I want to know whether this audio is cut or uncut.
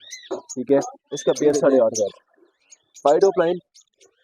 cut